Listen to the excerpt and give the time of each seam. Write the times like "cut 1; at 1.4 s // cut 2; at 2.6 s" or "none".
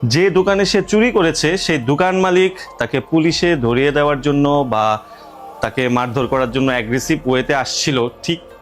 none